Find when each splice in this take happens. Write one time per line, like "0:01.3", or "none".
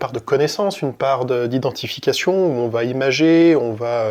none